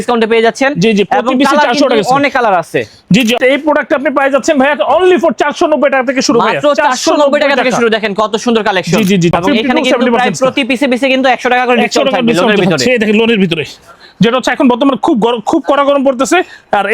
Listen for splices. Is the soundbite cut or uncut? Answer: cut